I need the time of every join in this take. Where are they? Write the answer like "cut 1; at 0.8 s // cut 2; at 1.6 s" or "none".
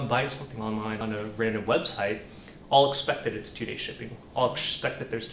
cut 1; at 1.0 s